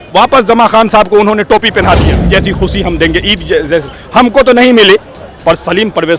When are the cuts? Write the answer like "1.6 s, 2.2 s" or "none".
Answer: 2.1 s